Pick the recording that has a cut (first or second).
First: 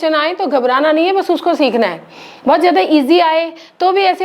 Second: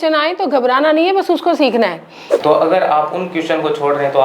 second